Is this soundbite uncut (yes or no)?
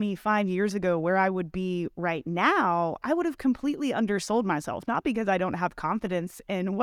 yes